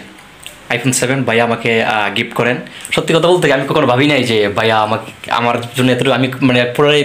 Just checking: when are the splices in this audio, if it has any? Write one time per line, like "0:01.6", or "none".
0:02.7